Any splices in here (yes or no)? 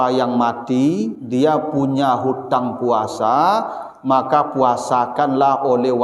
no